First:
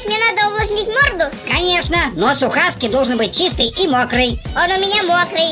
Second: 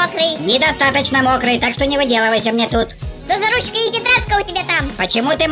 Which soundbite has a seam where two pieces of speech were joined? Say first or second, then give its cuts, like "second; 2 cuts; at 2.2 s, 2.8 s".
second; 1 cut; at 3.1 s